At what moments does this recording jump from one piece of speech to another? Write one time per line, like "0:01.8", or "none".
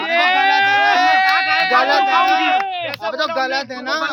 none